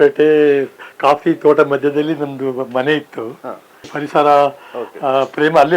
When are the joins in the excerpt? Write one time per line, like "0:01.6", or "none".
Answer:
0:03.9